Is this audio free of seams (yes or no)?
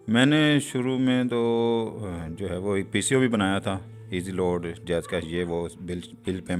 yes